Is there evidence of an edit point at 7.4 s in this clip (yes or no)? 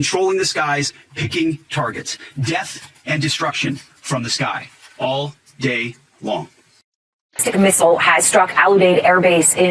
yes